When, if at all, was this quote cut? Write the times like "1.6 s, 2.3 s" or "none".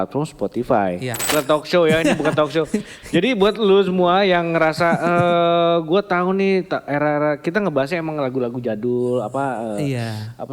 1.2 s